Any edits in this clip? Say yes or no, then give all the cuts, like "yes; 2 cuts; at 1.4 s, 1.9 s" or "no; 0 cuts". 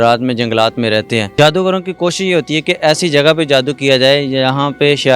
yes; 1 cut; at 1.3 s